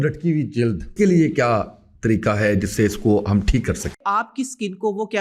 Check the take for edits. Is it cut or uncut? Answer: cut